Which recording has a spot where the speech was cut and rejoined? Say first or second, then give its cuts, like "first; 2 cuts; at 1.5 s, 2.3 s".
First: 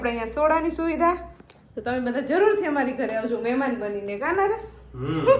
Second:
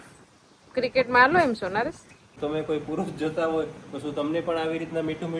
second; 1 cut; at 2.3 s